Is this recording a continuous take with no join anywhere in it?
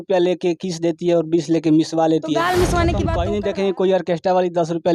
no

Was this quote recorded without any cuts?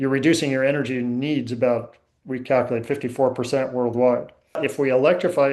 no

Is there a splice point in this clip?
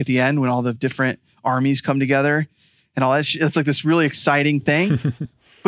no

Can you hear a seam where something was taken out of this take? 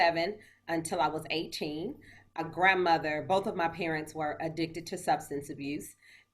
yes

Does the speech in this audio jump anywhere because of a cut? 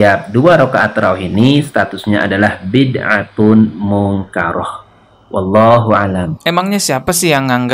yes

